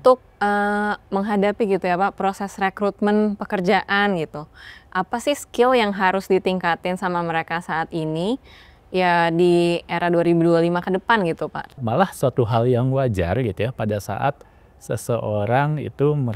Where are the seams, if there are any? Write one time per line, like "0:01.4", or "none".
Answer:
0:11.8